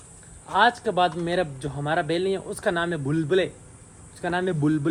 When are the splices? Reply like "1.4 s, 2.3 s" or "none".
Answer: none